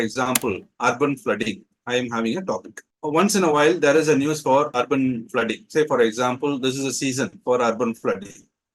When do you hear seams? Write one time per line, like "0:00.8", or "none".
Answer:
0:04.7